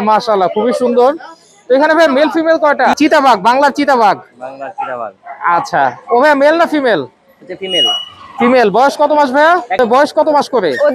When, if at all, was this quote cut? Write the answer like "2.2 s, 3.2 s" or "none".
3.0 s, 9.8 s